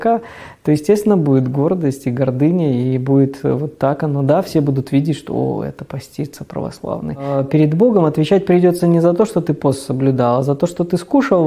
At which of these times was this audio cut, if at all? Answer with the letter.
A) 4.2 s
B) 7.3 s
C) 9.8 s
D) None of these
B